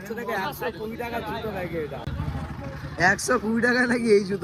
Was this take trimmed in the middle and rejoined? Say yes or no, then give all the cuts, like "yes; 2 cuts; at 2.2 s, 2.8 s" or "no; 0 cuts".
no; 0 cuts